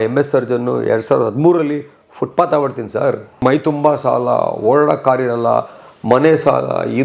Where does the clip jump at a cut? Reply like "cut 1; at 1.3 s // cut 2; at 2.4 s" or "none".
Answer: cut 1; at 3.4 s